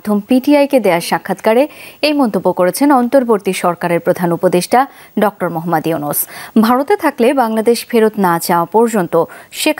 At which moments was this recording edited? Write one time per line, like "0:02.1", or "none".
none